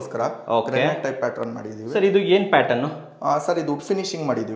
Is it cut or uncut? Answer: uncut